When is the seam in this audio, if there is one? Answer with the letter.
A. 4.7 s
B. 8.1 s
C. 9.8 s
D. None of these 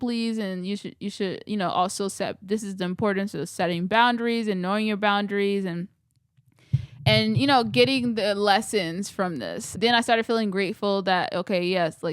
C